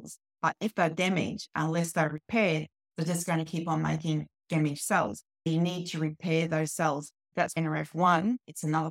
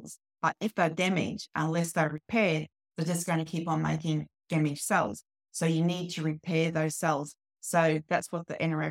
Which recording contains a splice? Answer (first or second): first